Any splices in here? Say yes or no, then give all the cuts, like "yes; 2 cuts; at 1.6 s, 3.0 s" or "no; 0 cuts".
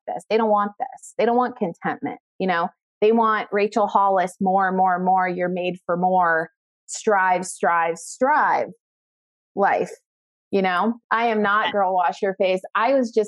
yes; 1 cut; at 11.0 s